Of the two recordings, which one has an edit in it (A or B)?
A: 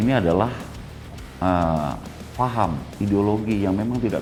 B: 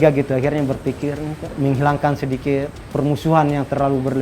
B